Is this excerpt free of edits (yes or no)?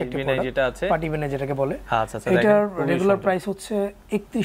yes